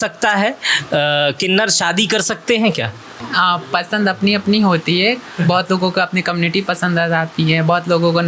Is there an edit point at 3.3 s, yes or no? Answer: yes